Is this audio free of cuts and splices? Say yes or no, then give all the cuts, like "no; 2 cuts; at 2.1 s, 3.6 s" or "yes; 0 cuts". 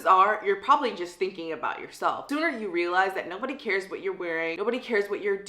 no; 2 cuts; at 2.2 s, 4.5 s